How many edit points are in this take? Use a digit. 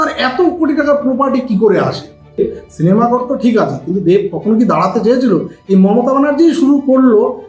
1